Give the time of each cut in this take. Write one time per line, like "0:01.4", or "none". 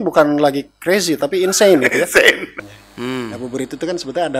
0:02.5